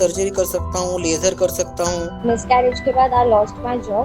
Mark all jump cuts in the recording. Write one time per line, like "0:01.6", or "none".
0:02.1